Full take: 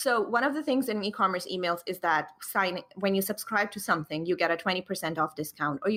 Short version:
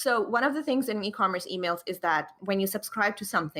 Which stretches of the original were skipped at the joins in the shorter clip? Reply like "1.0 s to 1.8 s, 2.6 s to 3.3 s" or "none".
2.3 s to 2.9 s